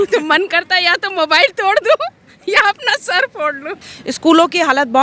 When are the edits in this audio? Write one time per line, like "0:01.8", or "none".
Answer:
0:03.9